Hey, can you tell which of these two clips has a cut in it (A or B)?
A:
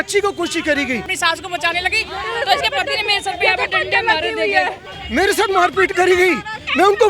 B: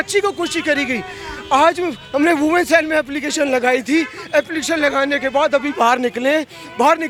A